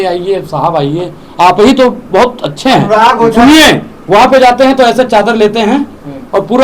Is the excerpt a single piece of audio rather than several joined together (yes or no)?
yes